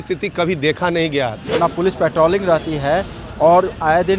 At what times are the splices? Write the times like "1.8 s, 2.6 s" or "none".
1.4 s

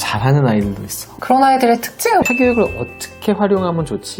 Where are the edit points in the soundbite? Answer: 1.1 s, 2.2 s

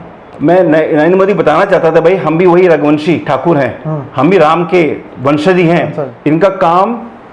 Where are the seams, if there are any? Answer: 6.1 s

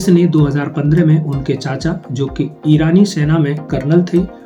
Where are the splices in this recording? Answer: none

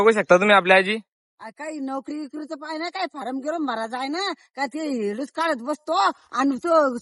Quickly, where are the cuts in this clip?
none

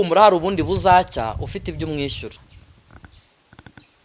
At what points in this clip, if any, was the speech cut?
none

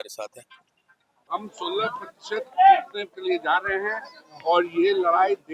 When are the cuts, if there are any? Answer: 1.3 s

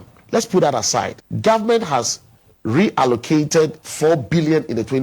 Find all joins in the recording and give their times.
1.2 s, 3.8 s

